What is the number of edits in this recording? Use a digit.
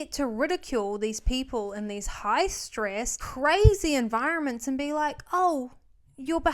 1